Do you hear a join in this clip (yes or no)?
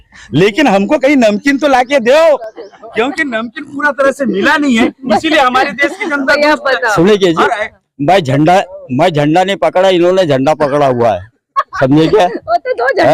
no